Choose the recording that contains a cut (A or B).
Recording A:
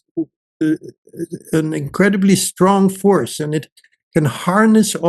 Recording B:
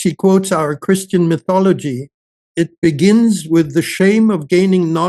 B